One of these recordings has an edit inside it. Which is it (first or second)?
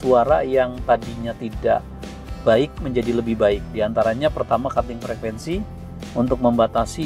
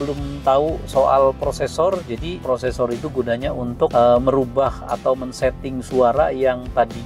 second